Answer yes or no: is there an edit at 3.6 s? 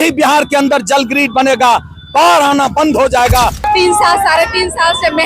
yes